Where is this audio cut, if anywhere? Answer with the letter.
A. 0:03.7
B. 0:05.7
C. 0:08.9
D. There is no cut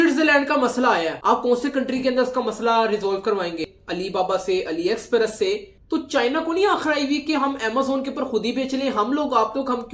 A